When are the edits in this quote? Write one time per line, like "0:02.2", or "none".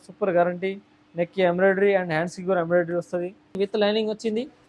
0:03.5